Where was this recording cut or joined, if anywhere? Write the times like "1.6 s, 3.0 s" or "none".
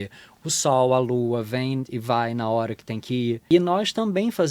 3.4 s